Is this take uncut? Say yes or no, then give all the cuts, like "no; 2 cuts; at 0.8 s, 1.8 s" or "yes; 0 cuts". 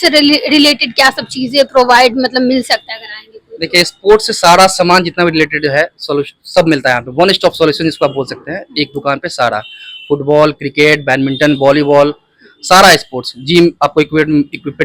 yes; 0 cuts